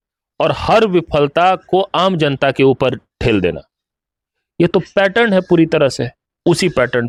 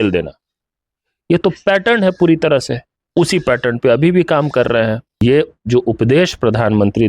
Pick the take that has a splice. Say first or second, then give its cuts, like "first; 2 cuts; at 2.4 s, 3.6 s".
second; 1 cut; at 5.1 s